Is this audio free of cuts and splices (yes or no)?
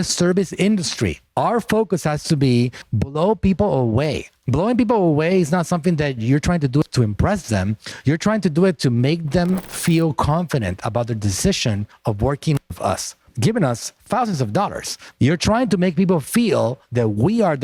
yes